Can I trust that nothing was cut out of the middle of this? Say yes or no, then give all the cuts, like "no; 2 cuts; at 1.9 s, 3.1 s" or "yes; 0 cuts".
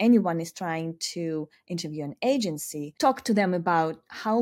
no; 1 cut; at 2.8 s